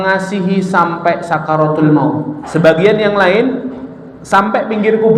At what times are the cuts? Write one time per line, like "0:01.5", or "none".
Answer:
0:02.4